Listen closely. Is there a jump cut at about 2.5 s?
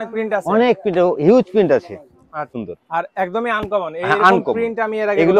yes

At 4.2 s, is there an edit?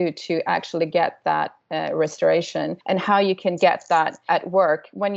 yes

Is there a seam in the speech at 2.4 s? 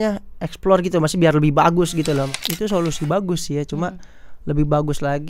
yes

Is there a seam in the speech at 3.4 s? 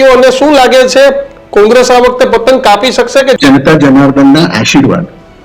yes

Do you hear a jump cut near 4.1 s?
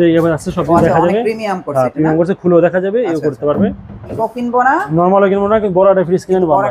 yes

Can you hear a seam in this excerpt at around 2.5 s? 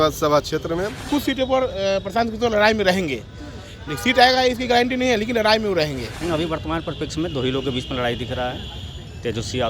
no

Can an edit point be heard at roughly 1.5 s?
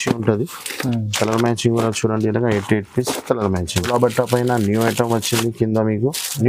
no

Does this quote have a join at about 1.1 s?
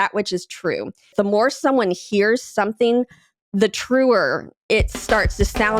yes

